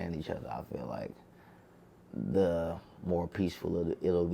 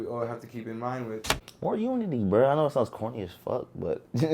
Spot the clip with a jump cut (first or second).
second